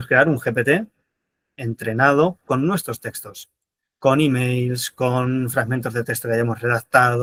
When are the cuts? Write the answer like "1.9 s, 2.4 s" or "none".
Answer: none